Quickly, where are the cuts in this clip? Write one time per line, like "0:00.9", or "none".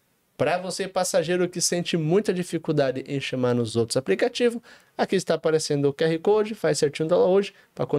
none